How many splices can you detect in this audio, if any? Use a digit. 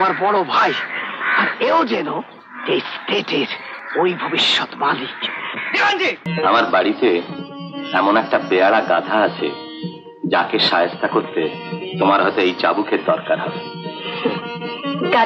1